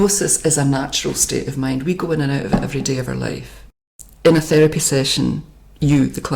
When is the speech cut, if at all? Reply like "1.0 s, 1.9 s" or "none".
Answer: 3.9 s

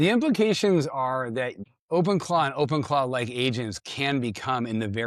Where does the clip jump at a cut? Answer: 1.7 s

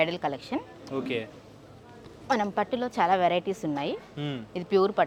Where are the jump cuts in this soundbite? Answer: none

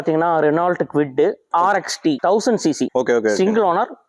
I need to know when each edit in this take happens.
2.2 s, 2.9 s

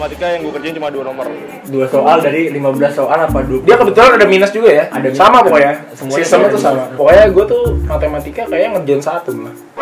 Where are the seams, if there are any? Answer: none

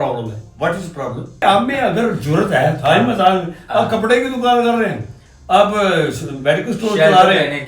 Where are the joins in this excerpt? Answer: 1.4 s

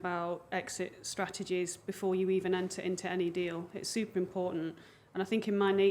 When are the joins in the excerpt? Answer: none

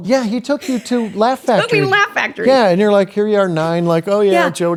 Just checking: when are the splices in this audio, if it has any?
none

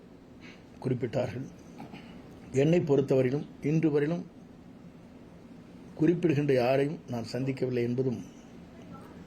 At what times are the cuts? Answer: none

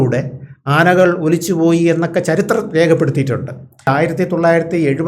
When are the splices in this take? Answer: 3.8 s

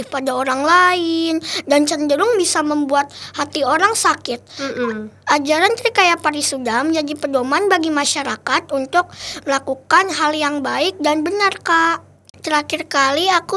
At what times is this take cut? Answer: 12.3 s

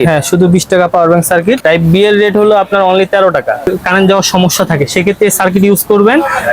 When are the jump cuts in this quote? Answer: 1.6 s, 3.7 s

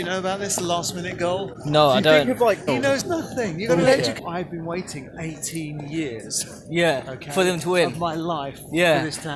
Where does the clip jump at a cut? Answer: 3.0 s, 4.1 s

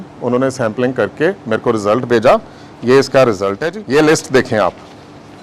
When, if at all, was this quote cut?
3.7 s

